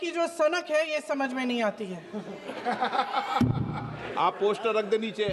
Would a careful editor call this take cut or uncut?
cut